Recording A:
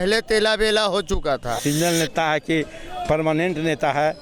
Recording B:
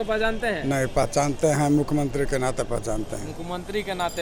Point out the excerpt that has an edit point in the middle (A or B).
A